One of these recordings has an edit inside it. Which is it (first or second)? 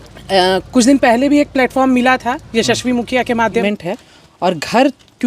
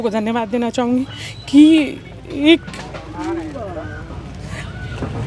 first